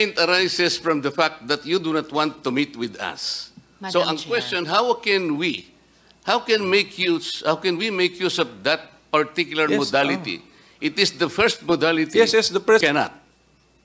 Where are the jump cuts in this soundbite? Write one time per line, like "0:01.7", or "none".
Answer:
0:12.8